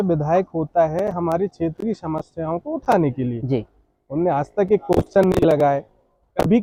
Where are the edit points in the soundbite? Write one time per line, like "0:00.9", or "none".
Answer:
none